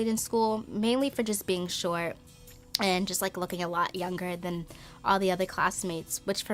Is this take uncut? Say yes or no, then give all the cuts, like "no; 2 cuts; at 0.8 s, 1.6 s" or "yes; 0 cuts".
yes; 0 cuts